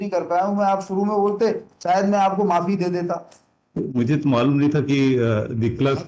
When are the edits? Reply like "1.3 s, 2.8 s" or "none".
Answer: none